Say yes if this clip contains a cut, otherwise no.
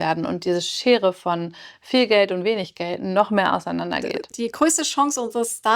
yes